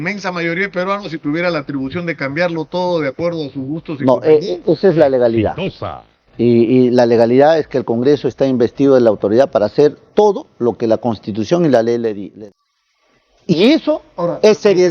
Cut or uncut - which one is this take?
cut